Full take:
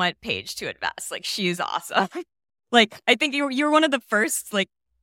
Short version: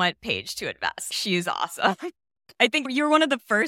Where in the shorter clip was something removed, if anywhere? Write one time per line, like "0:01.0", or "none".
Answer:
0:01.1
0:02.6